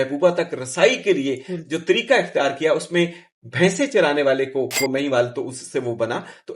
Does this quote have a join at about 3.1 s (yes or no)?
no